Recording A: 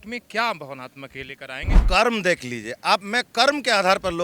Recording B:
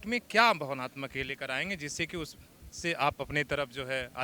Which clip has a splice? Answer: A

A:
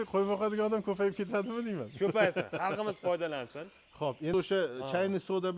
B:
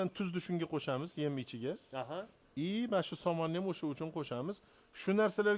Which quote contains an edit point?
A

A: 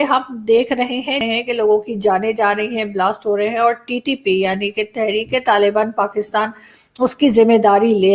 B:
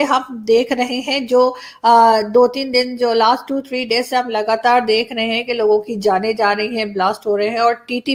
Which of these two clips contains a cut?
A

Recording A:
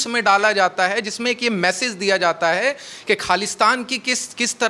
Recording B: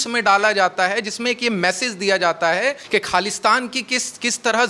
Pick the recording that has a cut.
B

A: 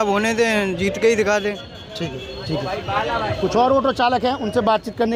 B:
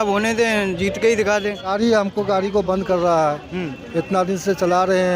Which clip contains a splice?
B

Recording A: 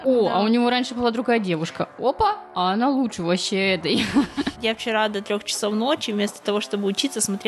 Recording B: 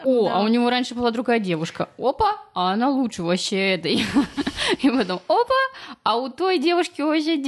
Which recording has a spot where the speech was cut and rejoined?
A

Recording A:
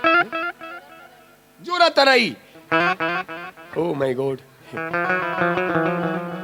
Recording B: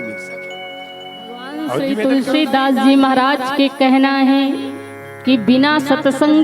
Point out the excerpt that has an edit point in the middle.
B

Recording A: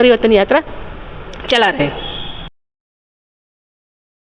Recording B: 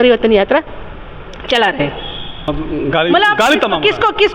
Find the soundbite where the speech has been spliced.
B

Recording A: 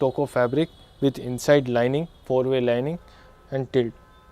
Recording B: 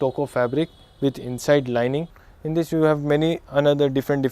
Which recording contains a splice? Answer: B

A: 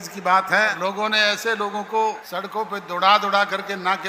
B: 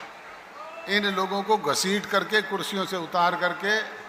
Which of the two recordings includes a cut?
A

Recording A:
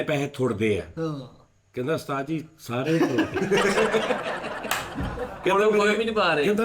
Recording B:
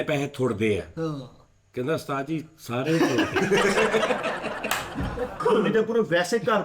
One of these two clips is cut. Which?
B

